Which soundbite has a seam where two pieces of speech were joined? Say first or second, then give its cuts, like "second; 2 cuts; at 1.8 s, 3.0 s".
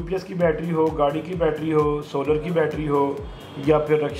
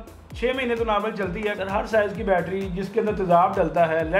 second; 1 cut; at 1.6 s